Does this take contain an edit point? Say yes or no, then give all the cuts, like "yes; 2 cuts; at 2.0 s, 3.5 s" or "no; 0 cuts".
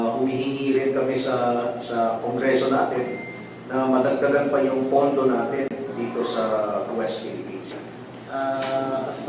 yes; 1 cut; at 7.8 s